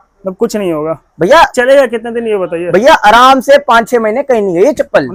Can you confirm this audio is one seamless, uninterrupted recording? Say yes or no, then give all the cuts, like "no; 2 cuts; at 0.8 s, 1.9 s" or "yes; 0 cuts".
yes; 0 cuts